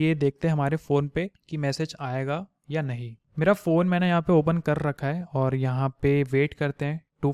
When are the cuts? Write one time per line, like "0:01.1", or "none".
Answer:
none